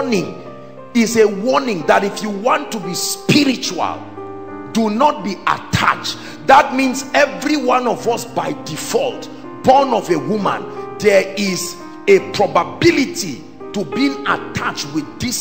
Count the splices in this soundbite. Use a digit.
0